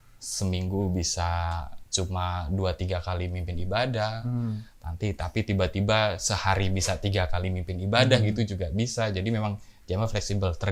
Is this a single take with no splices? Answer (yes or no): yes